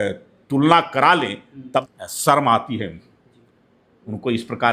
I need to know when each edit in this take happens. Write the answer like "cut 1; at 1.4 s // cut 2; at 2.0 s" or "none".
cut 1; at 1.8 s